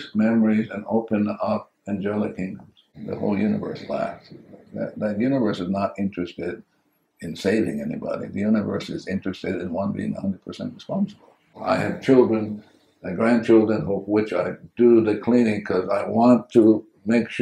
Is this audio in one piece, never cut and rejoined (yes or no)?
no